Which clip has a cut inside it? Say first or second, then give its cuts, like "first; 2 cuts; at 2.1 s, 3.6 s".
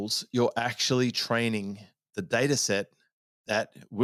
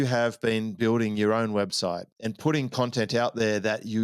second; 1 cut; at 2.1 s